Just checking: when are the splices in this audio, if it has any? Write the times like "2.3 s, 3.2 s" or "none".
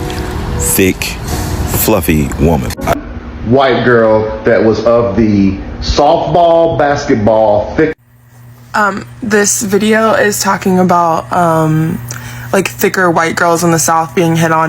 3.0 s